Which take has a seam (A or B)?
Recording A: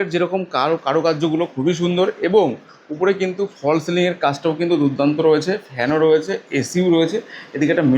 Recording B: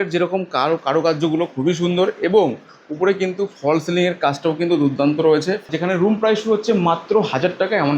B